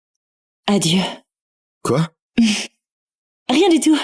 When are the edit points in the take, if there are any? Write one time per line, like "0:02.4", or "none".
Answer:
0:02.2